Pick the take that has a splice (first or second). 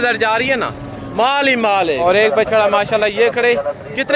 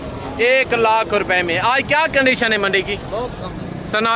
first